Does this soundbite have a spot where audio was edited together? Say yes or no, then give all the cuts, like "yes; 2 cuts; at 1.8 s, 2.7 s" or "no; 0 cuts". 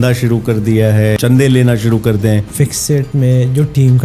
yes; 2 cuts; at 1.2 s, 2.5 s